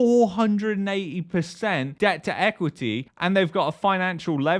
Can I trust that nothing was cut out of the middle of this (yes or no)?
yes